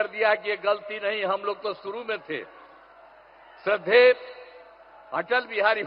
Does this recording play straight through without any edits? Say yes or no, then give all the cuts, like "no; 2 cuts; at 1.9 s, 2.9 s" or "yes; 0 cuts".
yes; 0 cuts